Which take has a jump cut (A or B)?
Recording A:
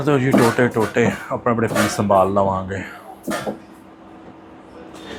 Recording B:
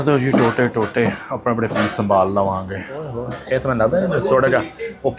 B